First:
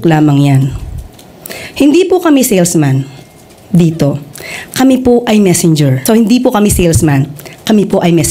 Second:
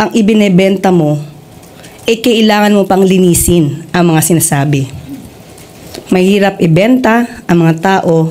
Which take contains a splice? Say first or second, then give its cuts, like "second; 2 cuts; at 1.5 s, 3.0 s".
first; 1 cut; at 6.0 s